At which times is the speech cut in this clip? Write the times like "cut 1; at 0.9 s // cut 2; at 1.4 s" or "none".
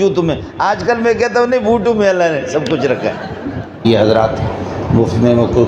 cut 1; at 3.8 s